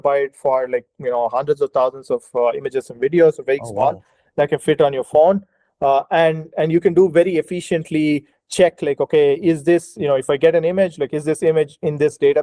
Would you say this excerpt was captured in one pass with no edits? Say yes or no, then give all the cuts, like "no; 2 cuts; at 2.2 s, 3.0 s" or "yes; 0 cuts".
yes; 0 cuts